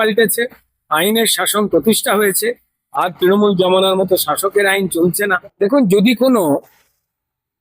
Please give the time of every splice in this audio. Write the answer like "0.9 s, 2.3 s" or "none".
5.5 s